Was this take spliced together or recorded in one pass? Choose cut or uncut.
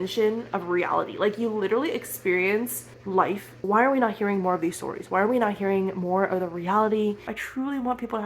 cut